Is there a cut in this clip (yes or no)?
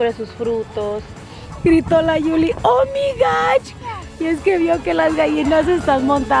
yes